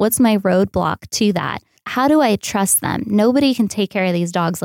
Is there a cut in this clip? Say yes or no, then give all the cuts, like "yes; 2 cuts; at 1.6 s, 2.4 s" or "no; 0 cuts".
yes; 1 cut; at 1.8 s